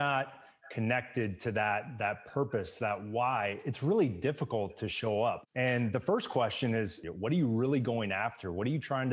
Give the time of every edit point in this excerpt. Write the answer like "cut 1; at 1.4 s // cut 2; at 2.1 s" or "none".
cut 1; at 5.4 s // cut 2; at 7.0 s